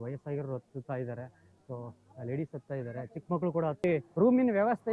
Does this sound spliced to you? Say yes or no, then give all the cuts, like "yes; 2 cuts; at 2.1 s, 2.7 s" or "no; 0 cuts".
yes; 1 cut; at 3.8 s